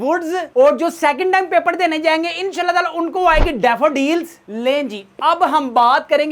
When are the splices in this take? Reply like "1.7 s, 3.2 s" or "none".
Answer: none